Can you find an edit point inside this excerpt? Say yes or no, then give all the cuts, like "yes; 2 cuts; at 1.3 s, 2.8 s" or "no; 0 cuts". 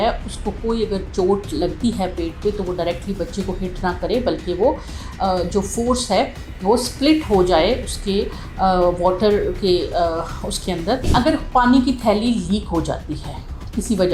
yes; 1 cut; at 11.1 s